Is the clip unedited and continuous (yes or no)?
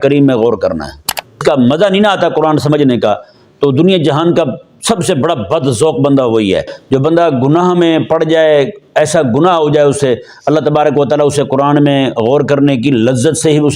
no